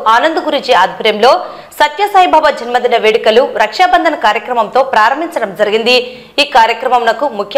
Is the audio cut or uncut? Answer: uncut